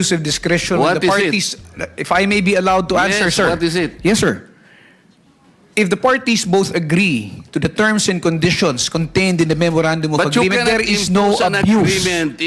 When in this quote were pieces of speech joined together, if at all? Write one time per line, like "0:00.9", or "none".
none